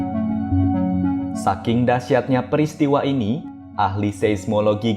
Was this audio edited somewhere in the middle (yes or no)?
yes